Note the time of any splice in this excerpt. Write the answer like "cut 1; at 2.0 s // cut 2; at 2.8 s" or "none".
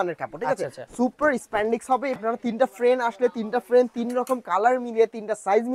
cut 1; at 2.2 s